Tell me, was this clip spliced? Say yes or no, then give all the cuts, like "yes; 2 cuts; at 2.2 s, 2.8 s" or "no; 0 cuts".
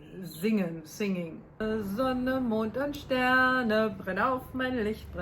yes; 1 cut; at 1.6 s